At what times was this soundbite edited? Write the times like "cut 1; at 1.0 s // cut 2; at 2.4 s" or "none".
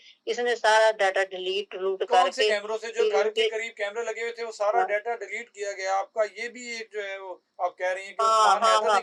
none